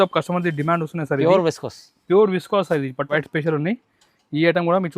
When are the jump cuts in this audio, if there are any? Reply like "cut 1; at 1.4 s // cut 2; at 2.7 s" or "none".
cut 1; at 3.1 s